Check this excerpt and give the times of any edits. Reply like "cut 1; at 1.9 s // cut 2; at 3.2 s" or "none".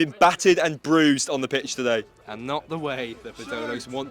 cut 1; at 2.3 s